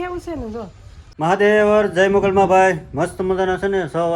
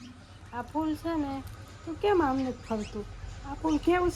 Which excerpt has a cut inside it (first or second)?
first